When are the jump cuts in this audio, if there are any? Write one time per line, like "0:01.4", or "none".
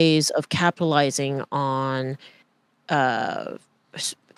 none